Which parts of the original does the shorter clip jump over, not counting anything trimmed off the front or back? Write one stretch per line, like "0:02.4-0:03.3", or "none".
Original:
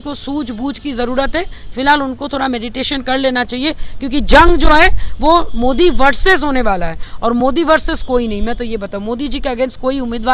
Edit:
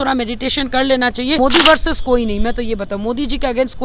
0:03.7-0:07.4